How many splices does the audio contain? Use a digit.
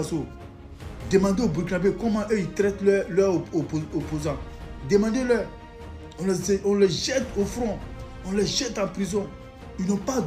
0